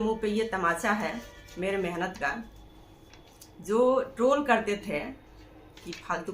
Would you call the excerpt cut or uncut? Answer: uncut